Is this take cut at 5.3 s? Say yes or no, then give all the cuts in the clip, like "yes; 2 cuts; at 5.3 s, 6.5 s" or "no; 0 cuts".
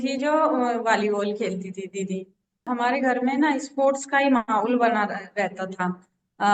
no; 1 cut; at 2.6 s